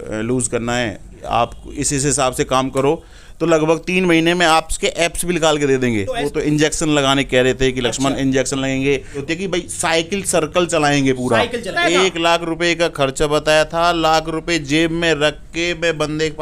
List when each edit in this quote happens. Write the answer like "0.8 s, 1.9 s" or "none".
1.2 s, 6.2 s, 9.2 s, 11.7 s